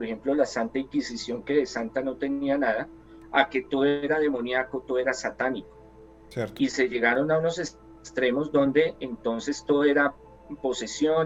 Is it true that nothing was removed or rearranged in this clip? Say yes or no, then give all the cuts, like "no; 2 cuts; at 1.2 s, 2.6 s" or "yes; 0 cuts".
yes; 0 cuts